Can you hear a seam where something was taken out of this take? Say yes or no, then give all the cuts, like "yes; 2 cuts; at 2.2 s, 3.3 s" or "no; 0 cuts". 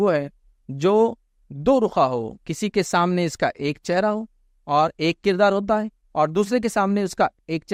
no; 0 cuts